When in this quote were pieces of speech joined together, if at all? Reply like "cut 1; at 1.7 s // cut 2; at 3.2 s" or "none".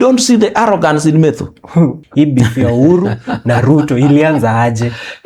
cut 1; at 2.0 s